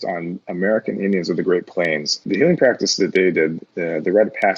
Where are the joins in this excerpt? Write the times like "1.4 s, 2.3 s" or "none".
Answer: 2.2 s